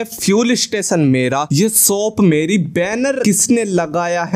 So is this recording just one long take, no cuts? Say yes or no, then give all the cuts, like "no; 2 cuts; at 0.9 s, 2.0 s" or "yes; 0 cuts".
no; 2 cuts; at 1.5 s, 3.2 s